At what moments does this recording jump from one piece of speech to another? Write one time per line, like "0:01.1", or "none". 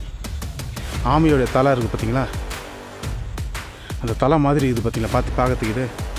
none